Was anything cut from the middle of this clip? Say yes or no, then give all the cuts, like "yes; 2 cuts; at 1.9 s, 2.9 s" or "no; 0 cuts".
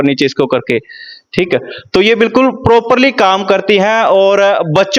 no; 0 cuts